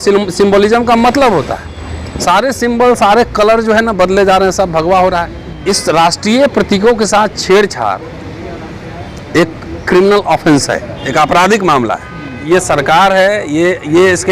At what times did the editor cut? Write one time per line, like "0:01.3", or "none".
0:05.5
0:12.3